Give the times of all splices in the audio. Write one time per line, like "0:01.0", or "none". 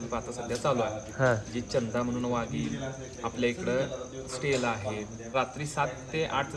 0:05.2